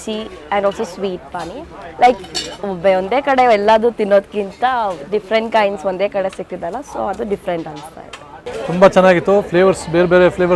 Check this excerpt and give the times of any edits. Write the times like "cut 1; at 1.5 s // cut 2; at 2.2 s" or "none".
none